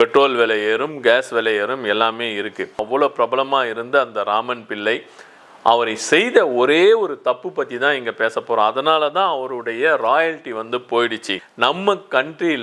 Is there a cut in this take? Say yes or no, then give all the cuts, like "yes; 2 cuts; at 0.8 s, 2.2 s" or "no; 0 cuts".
yes; 2 cuts; at 2.9 s, 11.4 s